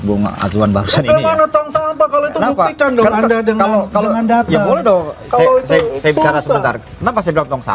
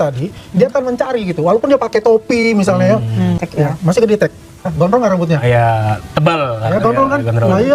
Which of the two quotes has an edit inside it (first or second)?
second